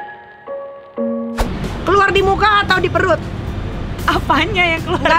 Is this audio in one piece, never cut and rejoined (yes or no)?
no